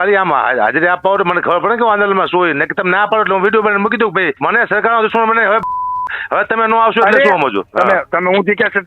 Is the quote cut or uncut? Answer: cut